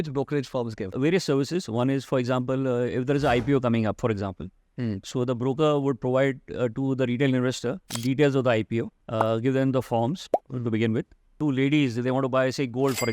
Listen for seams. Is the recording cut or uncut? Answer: cut